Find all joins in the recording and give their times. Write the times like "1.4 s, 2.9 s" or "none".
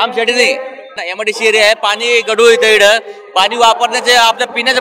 1.0 s

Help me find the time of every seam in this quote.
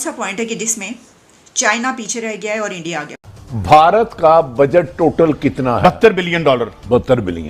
3.4 s

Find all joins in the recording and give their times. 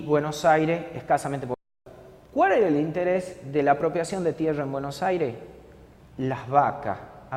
none

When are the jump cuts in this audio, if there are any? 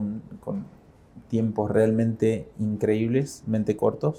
none

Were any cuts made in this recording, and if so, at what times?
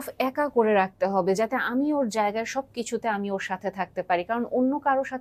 none

